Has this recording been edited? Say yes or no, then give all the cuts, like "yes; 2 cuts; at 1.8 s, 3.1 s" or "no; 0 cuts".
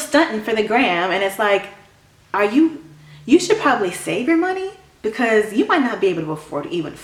no; 0 cuts